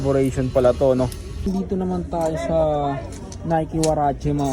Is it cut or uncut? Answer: cut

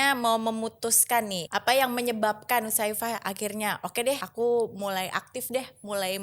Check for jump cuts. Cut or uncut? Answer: cut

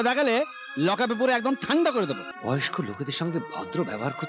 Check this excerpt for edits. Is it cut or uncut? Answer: cut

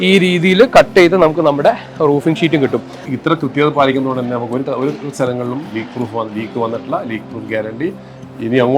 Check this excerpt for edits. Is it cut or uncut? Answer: cut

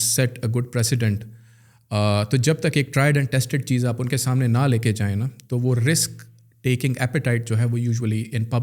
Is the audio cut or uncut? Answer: uncut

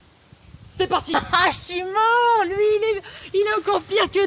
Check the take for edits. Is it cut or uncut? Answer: cut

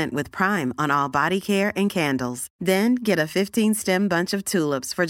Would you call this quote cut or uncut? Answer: uncut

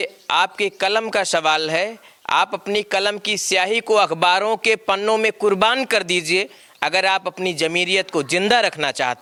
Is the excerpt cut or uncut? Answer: uncut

